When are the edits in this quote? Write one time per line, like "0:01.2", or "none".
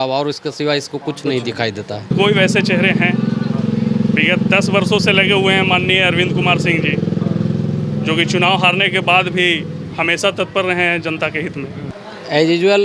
0:02.1
0:11.9